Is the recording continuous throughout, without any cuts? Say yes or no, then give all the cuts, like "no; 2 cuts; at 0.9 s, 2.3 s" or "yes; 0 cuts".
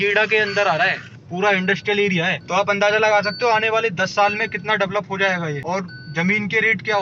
no; 1 cut; at 5.6 s